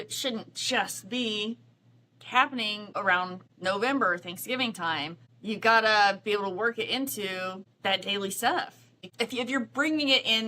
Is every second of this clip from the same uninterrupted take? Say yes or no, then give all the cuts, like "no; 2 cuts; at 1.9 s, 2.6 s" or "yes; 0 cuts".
no; 4 cuts; at 3.1 s, 5.3 s, 7.6 s, 9.1 s